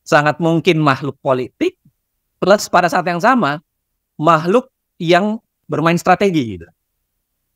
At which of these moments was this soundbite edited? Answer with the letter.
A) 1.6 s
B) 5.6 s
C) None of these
B